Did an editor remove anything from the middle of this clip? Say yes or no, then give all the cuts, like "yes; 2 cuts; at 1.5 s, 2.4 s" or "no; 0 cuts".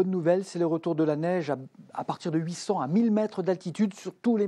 no; 0 cuts